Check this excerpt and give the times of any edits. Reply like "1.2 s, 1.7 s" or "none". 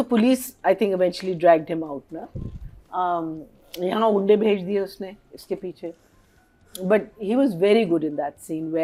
none